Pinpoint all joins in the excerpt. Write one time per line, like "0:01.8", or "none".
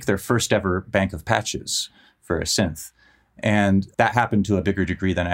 0:03.9